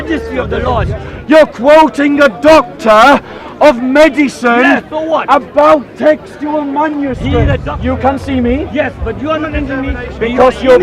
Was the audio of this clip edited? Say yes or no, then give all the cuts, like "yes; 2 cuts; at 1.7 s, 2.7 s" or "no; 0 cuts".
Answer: yes; 2 cuts; at 1.2 s, 7.7 s